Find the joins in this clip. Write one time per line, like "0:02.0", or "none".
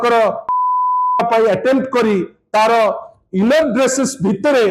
none